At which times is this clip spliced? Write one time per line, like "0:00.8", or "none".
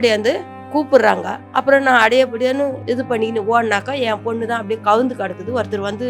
0:02.8